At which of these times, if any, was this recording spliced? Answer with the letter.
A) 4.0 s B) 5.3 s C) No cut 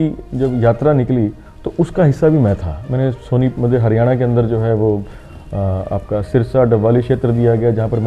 C